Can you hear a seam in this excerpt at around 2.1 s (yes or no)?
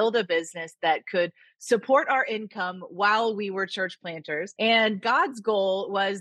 no